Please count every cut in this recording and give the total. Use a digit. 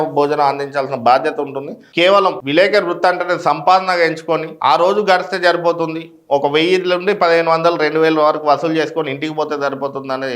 1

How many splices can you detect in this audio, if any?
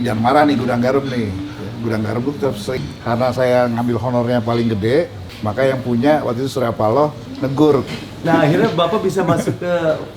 2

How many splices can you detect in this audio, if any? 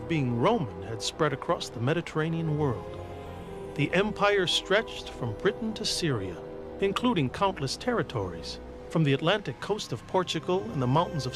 1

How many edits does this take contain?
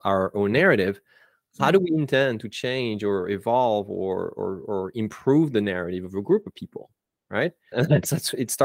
1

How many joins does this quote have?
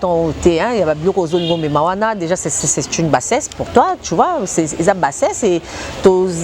0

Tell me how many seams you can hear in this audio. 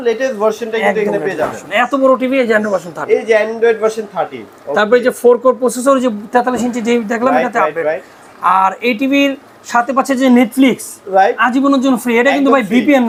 0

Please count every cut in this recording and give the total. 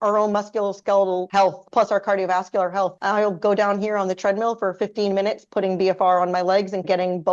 2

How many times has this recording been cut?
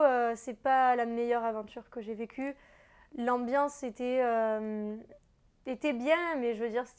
0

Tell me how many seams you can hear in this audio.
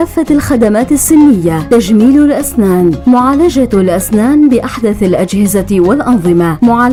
0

